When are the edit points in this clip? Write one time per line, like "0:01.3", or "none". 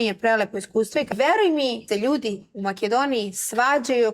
0:01.1
0:01.8